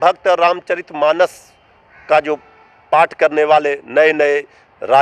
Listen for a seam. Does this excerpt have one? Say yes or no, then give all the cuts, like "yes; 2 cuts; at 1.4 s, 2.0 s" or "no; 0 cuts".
no; 0 cuts